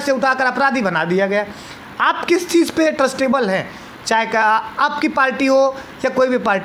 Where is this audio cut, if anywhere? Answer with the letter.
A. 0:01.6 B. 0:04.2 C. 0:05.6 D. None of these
D